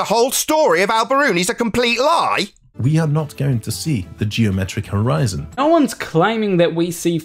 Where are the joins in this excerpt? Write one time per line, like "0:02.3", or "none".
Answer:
0:02.8
0:05.6

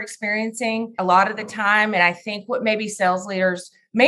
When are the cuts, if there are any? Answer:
0:01.0

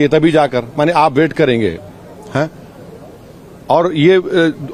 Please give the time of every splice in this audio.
none

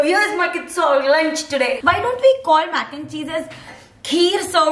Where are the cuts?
0:01.8

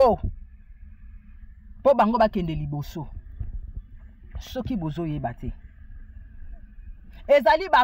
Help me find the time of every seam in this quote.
none

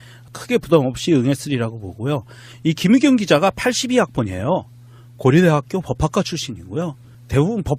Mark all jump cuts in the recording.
none

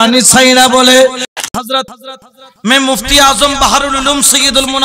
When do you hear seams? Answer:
0:01.3

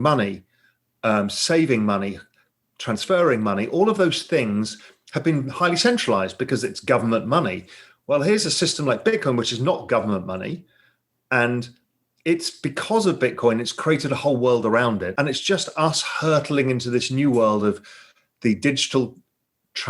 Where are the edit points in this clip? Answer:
0:15.1

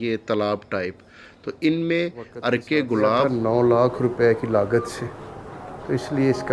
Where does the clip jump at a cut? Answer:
0:03.3

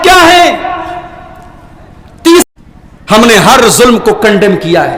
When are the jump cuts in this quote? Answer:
0:02.4

